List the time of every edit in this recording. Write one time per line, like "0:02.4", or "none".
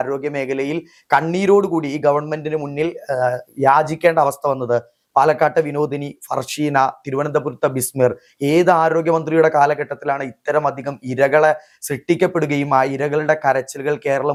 none